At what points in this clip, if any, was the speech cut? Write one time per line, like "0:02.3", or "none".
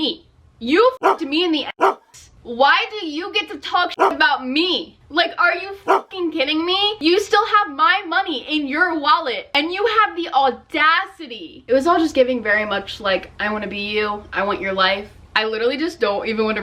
0:11.6
0:15.2